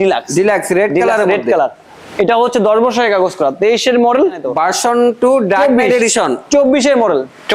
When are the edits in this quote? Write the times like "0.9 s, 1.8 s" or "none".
4.5 s